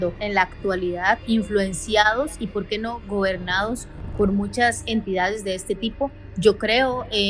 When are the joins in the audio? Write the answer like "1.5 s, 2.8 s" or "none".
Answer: 1.2 s

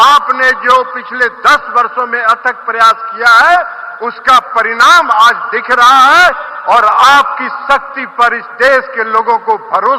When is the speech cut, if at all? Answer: 6.4 s

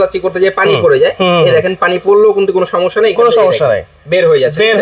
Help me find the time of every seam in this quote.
none

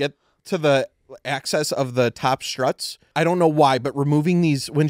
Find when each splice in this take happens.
2.9 s

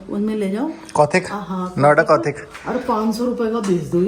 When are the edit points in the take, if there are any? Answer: none

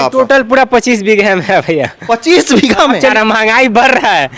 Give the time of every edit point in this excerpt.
3.1 s

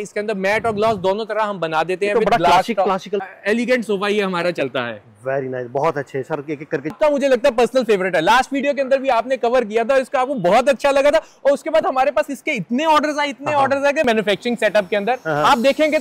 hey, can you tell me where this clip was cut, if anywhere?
3.2 s, 7.0 s, 14.0 s

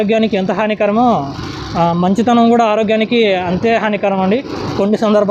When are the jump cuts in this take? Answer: none

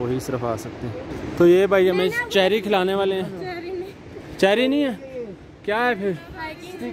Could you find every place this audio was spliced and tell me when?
1.1 s

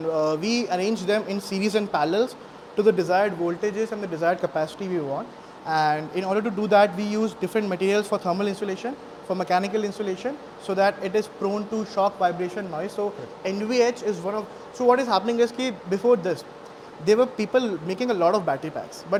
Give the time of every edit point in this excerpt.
none

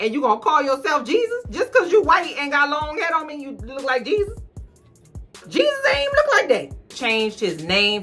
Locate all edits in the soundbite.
6.9 s

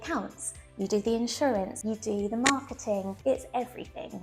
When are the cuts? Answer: 1.8 s, 3.1 s

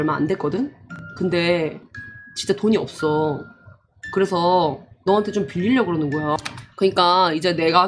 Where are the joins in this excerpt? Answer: 6.5 s

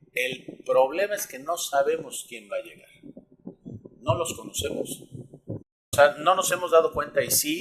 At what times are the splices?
5.8 s

